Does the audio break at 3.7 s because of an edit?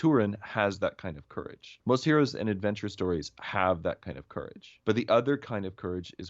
no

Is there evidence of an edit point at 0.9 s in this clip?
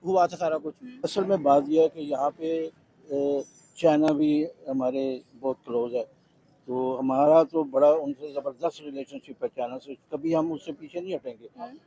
yes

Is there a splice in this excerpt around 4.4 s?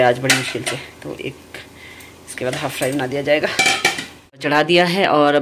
yes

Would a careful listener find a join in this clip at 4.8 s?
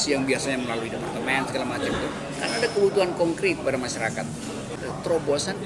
yes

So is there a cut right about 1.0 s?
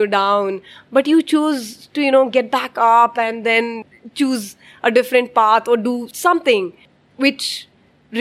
no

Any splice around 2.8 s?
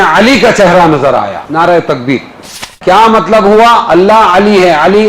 yes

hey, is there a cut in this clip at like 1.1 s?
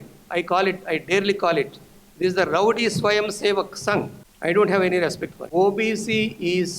no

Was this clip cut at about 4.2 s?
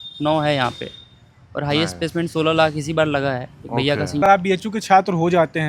yes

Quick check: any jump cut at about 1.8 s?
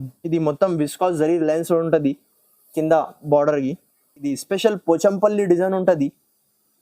no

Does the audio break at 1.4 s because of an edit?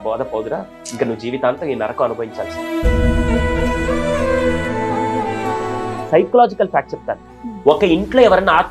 no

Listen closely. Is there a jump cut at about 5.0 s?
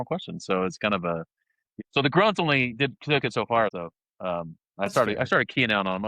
no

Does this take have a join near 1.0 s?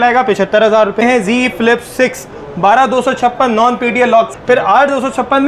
yes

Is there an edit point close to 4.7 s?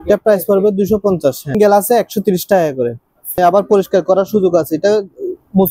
no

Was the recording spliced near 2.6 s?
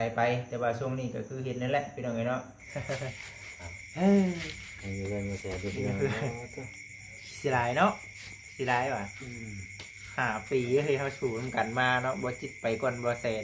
yes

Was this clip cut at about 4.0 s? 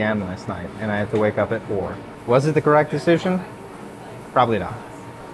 no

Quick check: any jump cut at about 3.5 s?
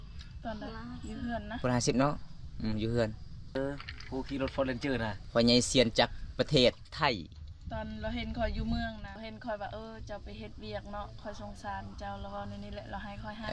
yes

